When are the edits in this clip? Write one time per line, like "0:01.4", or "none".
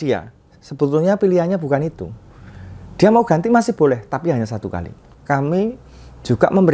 0:05.0